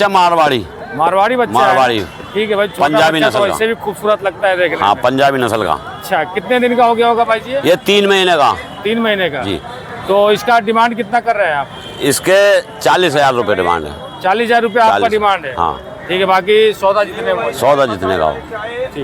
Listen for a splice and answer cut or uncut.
uncut